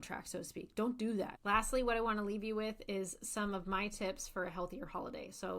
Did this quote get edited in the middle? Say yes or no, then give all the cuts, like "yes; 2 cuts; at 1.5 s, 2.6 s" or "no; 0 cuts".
yes; 1 cut; at 1.4 s